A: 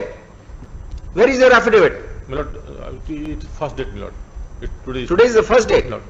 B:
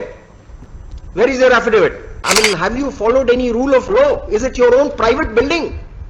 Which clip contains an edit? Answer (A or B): B